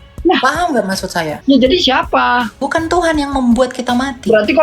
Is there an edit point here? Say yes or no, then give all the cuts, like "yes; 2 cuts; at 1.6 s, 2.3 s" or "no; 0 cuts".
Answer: yes; 2 cuts; at 1.3 s, 2.6 s